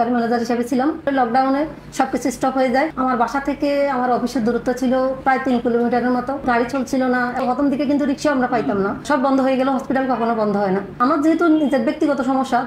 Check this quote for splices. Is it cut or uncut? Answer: cut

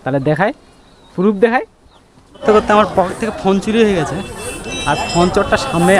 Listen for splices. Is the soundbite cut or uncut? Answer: cut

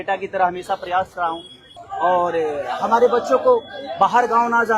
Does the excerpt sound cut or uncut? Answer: cut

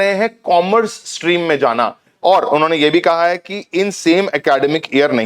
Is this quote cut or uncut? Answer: cut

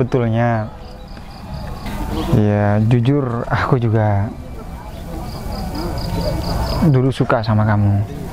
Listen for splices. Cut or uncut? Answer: cut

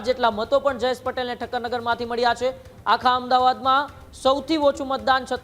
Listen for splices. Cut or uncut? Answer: uncut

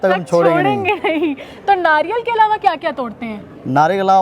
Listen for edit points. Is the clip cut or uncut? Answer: uncut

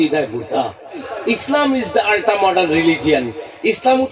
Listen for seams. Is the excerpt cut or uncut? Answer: cut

